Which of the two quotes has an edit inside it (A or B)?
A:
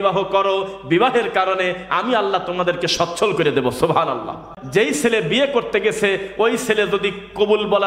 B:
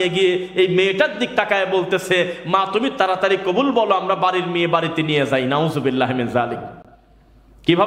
A